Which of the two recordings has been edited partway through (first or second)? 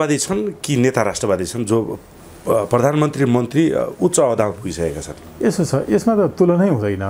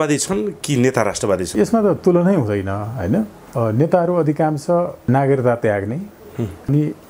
second